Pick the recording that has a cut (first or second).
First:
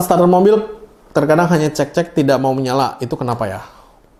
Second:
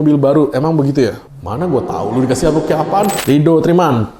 second